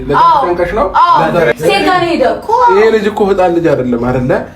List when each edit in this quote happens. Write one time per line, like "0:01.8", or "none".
0:01.5